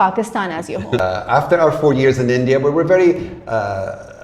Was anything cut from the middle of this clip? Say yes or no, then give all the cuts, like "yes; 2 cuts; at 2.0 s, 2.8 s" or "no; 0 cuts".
yes; 1 cut; at 1.0 s